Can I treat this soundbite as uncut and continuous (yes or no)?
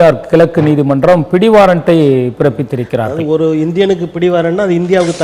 yes